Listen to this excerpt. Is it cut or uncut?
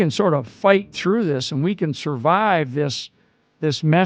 uncut